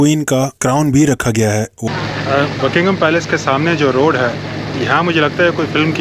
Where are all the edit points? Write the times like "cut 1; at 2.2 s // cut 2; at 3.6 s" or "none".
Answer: cut 1; at 1.8 s